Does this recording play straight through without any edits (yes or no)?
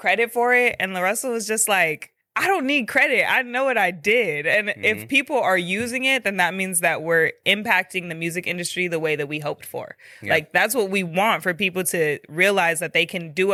yes